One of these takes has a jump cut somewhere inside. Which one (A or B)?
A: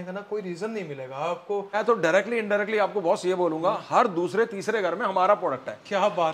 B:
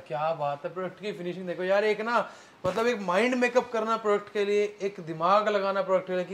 A